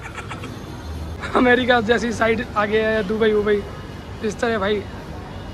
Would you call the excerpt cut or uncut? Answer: cut